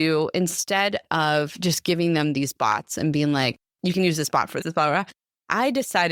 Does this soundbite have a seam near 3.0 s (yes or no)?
no